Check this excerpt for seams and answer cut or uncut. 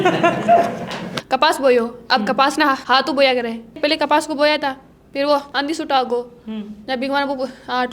cut